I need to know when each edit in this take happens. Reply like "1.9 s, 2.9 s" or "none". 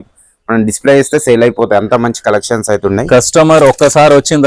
none